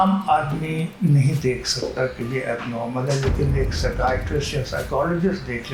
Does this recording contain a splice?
no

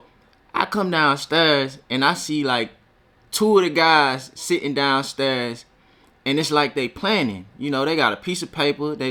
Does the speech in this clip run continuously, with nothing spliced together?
yes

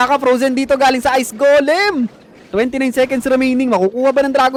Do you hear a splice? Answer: no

